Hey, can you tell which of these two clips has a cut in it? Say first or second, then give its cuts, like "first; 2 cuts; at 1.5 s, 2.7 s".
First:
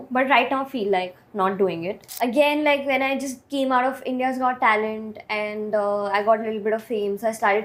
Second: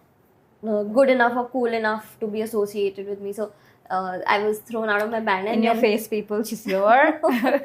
first; 1 cut; at 2.0 s